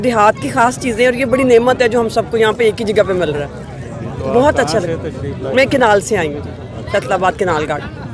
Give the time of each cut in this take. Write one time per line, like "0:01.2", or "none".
none